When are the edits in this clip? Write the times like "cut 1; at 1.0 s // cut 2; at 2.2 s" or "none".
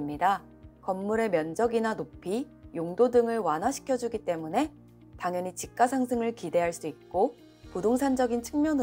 none